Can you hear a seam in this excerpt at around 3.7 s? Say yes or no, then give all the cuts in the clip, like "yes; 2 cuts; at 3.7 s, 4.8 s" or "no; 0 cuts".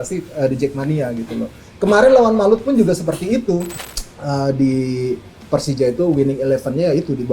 yes; 1 cut; at 3.7 s